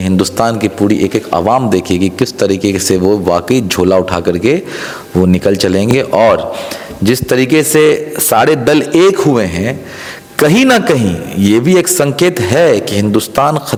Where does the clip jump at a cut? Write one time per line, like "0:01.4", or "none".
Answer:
none